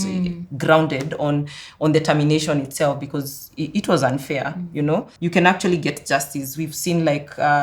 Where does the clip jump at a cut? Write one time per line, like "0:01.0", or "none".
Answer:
0:05.1

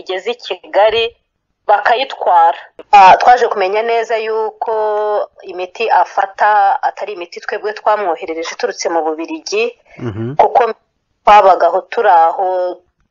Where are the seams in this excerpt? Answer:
0:02.7

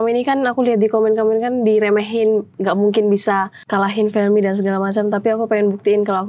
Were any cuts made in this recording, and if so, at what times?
0:03.6

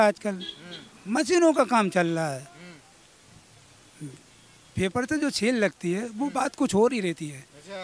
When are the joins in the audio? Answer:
none

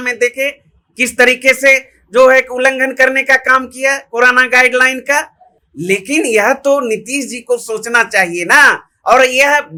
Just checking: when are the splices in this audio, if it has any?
none

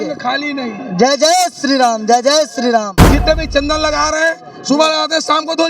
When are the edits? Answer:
0:02.9

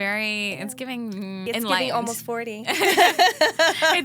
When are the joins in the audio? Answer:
0:01.4

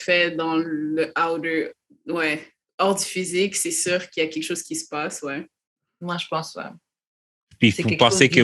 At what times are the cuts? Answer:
none

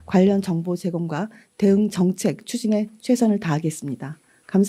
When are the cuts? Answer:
none

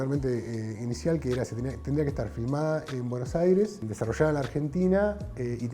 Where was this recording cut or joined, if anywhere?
0:03.8

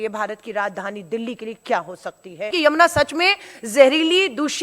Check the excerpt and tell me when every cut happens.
0:02.5

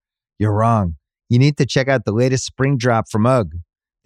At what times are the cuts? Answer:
none

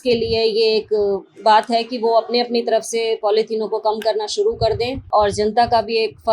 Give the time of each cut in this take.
0:05.0

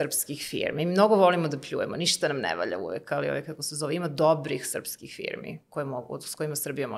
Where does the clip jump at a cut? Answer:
none

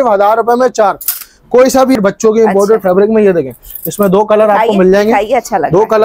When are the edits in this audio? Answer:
0:02.0

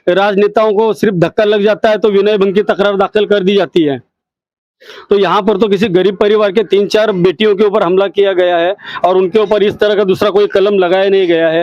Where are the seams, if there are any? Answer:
none

